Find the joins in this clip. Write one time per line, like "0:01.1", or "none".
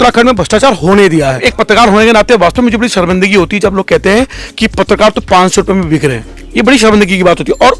0:01.5